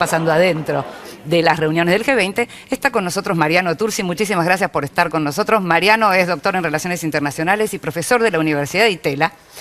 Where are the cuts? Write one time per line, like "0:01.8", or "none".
0:05.6